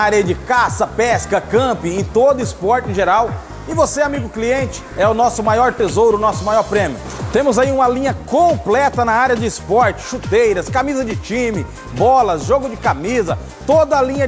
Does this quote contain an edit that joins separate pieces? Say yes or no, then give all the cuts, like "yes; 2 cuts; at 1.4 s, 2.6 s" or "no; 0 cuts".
no; 0 cuts